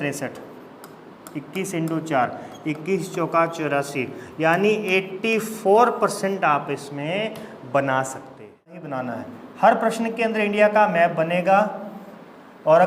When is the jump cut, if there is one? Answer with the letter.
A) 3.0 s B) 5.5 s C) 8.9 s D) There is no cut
C